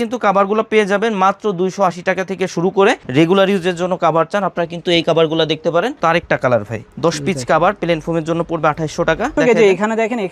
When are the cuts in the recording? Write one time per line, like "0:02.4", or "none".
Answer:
0:03.0
0:06.0
0:09.3